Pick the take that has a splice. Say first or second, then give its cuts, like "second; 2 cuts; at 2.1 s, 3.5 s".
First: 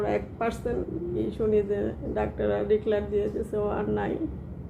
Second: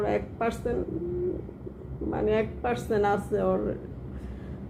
first; 1 cut; at 1.1 s